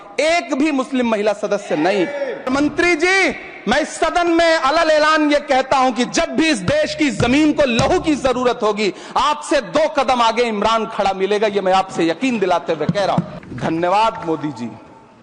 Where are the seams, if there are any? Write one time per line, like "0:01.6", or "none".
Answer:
0:02.5
0:13.3